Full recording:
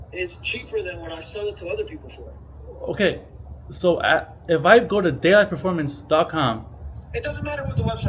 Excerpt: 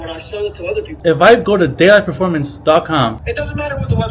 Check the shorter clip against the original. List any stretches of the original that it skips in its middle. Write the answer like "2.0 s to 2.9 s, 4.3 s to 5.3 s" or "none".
1.9 s to 4.4 s, 6.7 s to 7.1 s